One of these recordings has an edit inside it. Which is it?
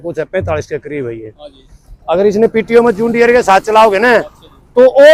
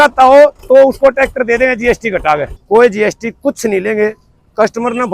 second; 1 cut; at 2.5 s

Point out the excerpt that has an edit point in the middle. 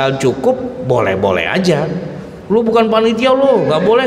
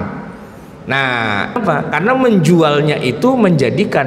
second; 1 cut; at 1.6 s

